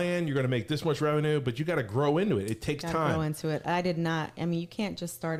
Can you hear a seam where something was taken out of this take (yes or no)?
no